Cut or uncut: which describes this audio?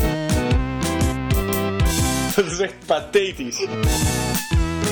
cut